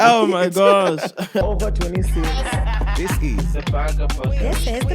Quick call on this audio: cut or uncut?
cut